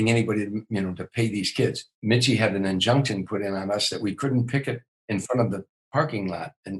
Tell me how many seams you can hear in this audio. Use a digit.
1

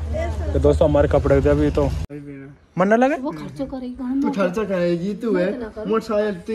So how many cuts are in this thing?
1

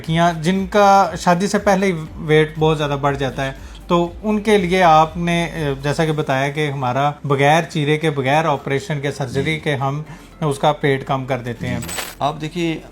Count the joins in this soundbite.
2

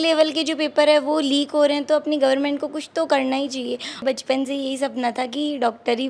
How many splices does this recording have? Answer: 1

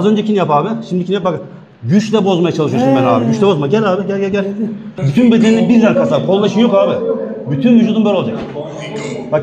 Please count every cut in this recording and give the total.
1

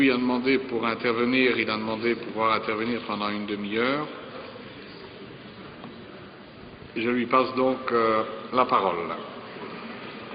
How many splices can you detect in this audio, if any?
0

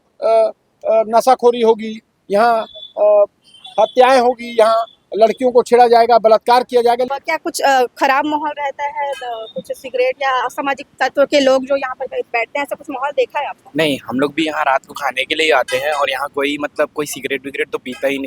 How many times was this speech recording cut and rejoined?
1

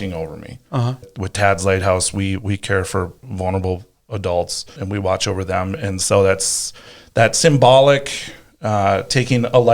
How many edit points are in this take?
3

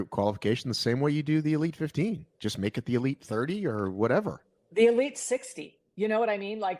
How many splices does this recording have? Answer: 0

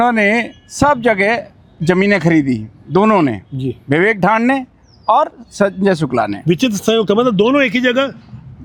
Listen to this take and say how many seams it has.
0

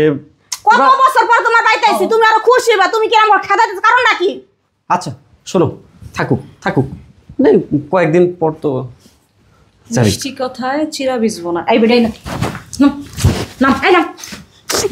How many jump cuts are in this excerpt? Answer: 0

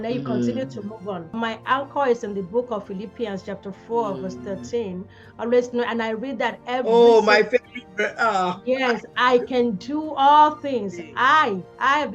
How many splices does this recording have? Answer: 1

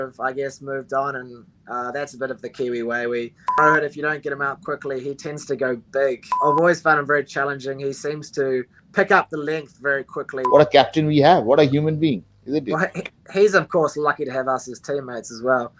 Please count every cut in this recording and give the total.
4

